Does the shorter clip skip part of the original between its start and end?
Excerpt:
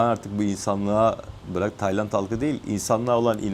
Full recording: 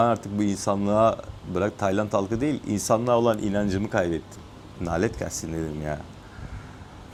no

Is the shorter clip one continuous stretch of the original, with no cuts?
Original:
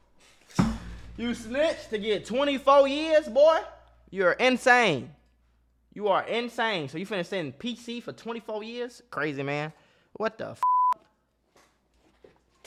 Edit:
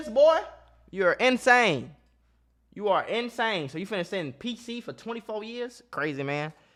yes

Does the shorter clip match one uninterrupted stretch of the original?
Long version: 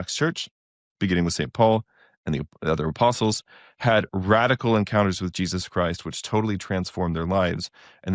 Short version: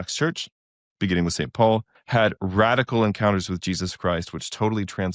no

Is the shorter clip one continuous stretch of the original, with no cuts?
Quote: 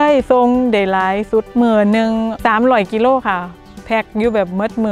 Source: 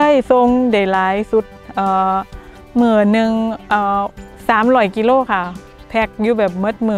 no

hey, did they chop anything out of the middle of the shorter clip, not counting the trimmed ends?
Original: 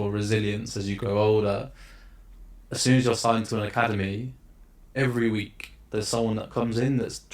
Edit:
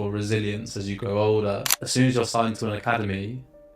yes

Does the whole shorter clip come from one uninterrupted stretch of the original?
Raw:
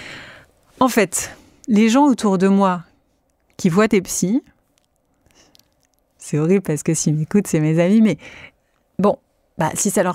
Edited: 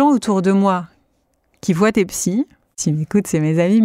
no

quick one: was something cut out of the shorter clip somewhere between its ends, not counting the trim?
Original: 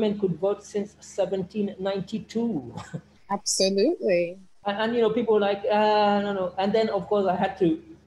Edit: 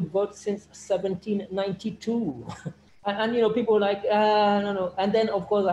yes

